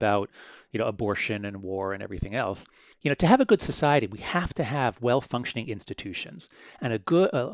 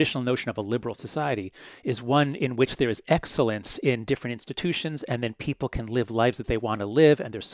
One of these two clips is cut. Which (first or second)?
first